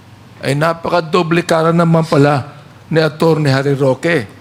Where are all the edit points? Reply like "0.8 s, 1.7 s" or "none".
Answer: none